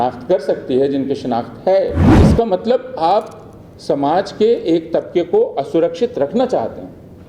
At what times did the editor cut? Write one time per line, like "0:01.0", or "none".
0:02.0

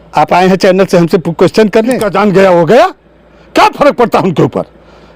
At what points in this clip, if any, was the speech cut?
0:02.0

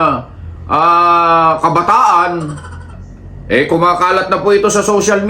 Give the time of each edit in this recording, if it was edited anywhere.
0:02.9

